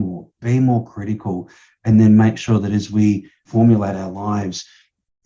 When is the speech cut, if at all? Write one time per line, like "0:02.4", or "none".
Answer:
0:03.5